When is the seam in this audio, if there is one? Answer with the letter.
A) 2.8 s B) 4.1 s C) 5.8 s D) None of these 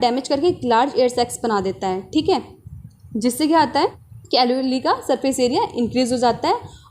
B